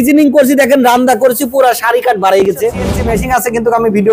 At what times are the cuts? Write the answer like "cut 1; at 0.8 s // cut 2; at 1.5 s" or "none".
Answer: cut 1; at 2.8 s